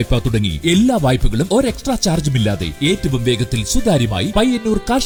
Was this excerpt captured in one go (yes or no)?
yes